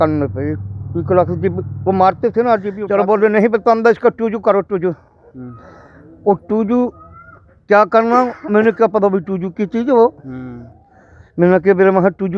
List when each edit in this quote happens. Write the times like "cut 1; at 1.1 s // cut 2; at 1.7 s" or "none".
cut 1; at 2.8 s

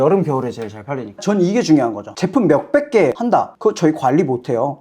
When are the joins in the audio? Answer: cut 1; at 1.2 s // cut 2; at 3.2 s

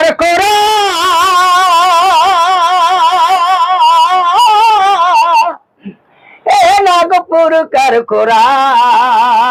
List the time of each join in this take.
none

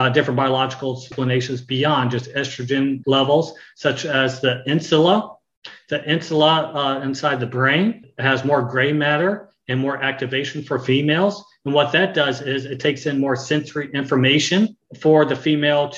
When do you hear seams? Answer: cut 1; at 1.1 s // cut 2; at 3.0 s // cut 3; at 8.1 s // cut 4; at 14.9 s

